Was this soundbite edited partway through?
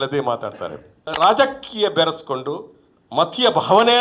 yes; 1 cut; at 1.0 s

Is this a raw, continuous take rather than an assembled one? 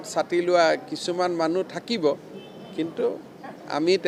yes; 0 cuts

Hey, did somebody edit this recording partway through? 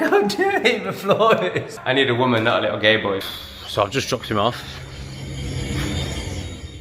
yes; 2 cuts; at 1.7 s, 3.2 s

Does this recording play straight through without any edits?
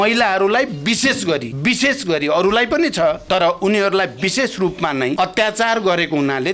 no; 3 cuts; at 1.5 s, 3.2 s, 5.1 s

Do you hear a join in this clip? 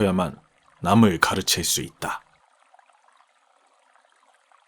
yes; 1 cut; at 2.3 s

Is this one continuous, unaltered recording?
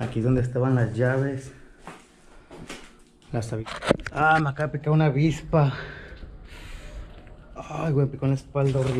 no; 1 cut; at 3.6 s

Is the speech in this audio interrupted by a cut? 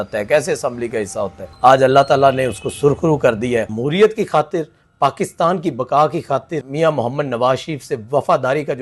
yes; 3 cuts; at 1.4 s, 3.8 s, 6.6 s

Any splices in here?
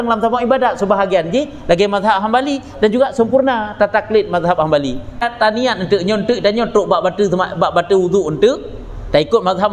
yes; 1 cut; at 5.3 s

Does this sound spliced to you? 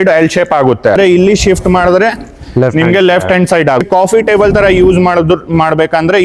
yes; 2 cuts; at 1.0 s, 3.8 s

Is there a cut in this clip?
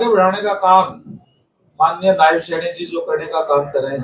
no; 0 cuts

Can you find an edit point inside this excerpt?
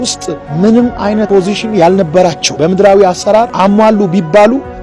yes; 3 cuts; at 1.3 s, 2.4 s, 3.5 s

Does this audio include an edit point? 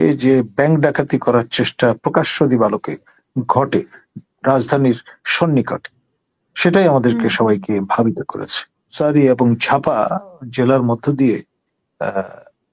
yes; 1 cut; at 8.9 s

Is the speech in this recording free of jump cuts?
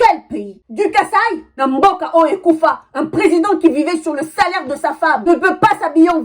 no; 2 cuts; at 1.4 s, 5.2 s

